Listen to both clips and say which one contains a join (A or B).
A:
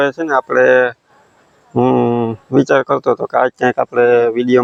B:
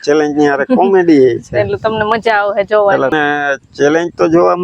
B